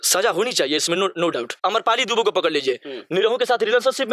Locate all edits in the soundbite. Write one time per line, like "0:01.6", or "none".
0:01.5